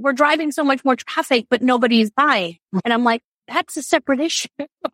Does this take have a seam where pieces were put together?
no; 0 cuts

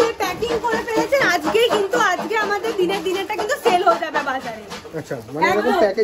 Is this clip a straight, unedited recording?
yes; 0 cuts

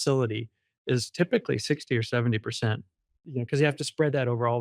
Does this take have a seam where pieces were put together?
yes; 1 cut; at 3.1 s

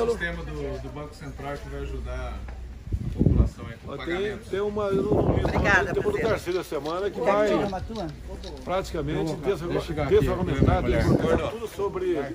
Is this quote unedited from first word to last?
yes; 0 cuts

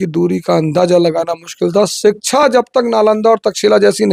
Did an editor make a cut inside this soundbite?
no; 0 cuts

